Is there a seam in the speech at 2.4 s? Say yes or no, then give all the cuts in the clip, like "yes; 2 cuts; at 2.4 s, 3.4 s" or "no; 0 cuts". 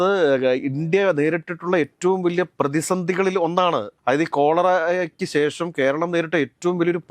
no; 1 cut; at 3.9 s